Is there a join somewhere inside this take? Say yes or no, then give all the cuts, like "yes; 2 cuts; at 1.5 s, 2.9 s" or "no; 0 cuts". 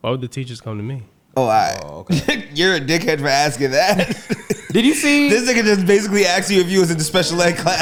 no; 0 cuts